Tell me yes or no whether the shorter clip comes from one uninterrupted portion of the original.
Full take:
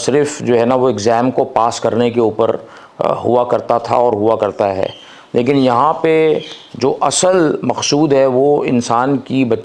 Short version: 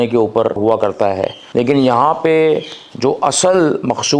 no